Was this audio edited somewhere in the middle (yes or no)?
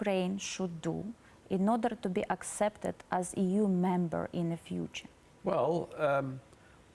no